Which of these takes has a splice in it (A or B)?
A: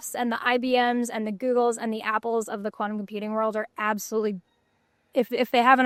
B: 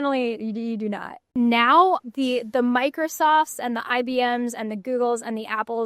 B